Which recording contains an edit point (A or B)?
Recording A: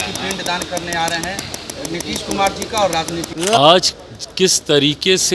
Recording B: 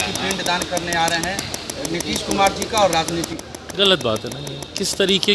A